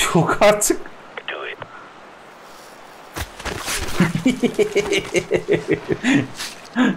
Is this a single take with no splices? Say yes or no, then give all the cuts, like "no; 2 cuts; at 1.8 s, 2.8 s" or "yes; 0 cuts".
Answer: no; 1 cut; at 4.0 s